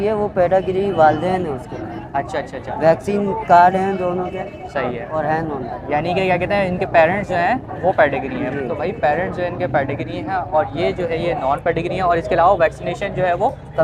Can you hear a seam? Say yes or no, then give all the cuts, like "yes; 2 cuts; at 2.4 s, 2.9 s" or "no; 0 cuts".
no; 0 cuts